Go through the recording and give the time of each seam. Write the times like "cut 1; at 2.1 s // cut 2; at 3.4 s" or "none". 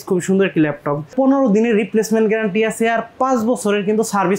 cut 1; at 1.1 s